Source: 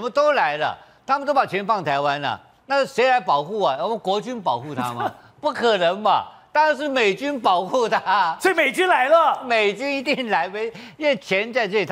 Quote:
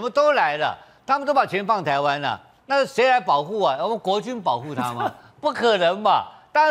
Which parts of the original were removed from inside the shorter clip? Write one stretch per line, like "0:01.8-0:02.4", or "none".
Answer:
none